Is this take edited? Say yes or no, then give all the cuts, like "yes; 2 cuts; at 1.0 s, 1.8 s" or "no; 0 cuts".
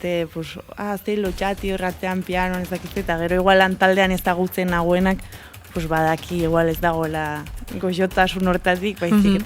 no; 0 cuts